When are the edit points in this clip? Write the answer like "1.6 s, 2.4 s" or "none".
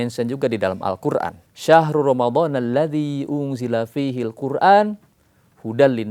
1.5 s